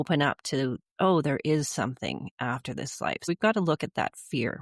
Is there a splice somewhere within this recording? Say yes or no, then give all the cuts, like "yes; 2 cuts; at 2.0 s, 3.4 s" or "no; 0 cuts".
yes; 1 cut; at 3.3 s